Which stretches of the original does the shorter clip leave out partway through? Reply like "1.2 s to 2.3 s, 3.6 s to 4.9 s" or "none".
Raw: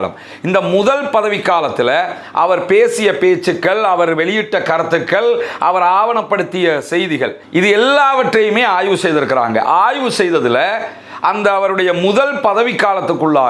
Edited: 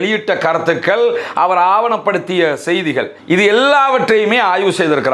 none